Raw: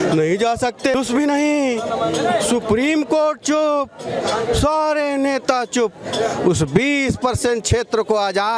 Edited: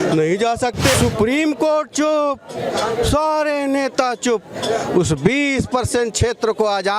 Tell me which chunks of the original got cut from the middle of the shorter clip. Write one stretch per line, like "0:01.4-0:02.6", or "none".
0:00.9-0:02.4